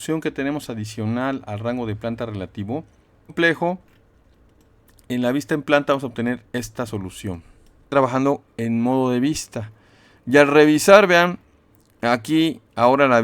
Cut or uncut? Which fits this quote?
cut